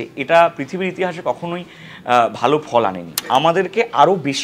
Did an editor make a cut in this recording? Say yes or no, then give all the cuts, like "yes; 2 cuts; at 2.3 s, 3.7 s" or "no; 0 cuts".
yes; 1 cut; at 3.2 s